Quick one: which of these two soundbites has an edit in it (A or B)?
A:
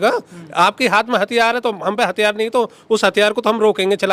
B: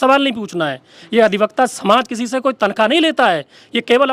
B